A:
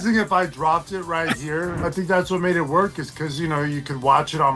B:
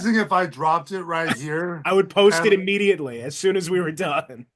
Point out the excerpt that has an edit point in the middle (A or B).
A